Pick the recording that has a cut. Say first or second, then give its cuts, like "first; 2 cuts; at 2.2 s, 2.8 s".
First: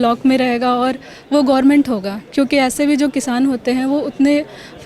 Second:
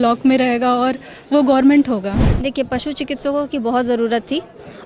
second; 1 cut; at 2.2 s